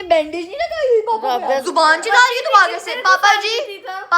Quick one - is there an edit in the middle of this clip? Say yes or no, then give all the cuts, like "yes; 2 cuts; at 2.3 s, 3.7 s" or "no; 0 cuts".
yes; 1 cut; at 1.6 s